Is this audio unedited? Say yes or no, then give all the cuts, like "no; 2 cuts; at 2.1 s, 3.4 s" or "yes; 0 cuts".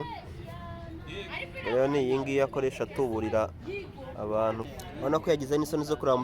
no; 1 cut; at 4.7 s